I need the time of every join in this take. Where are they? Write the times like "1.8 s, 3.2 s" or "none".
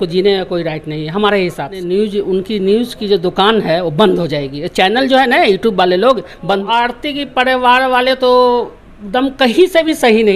1.9 s, 6.6 s